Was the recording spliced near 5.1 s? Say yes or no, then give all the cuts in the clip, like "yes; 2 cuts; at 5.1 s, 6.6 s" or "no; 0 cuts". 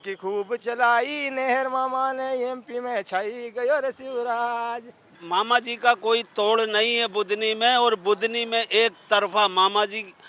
yes; 1 cut; at 5.1 s